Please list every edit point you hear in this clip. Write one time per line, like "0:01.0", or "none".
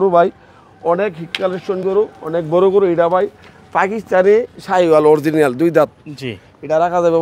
none